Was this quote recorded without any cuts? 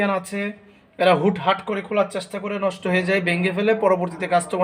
yes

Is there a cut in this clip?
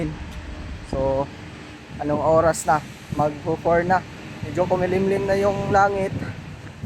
no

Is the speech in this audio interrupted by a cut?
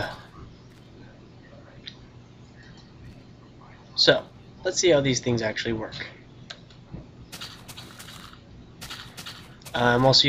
no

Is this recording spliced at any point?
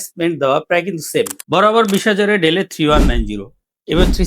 yes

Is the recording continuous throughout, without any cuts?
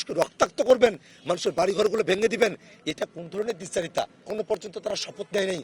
no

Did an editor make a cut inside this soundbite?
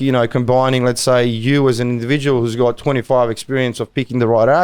no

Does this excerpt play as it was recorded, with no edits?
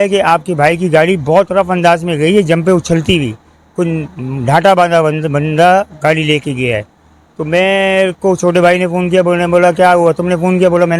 yes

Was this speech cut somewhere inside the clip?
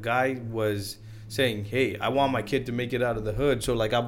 no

